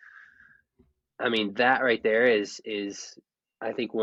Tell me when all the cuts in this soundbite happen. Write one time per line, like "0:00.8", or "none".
none